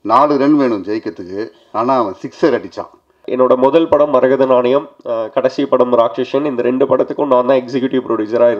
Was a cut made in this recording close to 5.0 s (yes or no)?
no